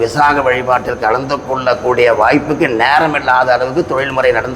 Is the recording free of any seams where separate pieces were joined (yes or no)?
yes